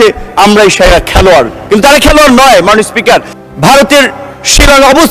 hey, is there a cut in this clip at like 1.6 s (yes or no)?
no